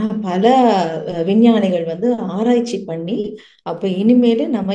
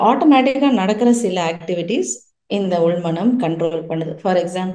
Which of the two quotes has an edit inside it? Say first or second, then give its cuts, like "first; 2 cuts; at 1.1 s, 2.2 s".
first; 1 cut; at 3.5 s